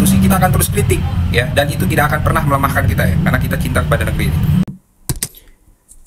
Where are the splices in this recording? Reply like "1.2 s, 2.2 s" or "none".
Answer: none